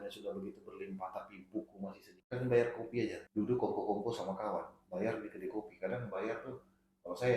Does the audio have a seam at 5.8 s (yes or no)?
no